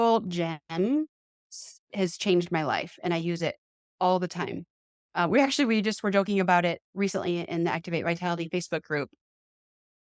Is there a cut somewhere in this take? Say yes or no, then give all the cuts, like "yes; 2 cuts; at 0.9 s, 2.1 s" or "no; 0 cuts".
no; 0 cuts